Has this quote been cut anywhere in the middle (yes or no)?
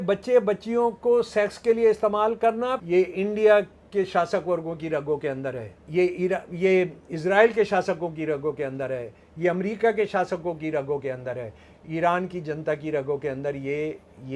yes